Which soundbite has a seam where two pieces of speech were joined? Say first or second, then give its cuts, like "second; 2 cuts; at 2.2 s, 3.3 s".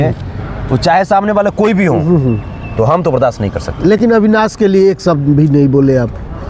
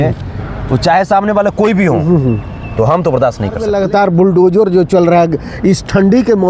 second; 1 cut; at 3.7 s